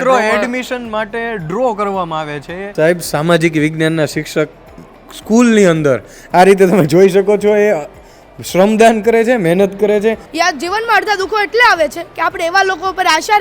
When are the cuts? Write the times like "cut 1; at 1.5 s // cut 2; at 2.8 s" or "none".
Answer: cut 1; at 2.8 s // cut 2; at 10.2 s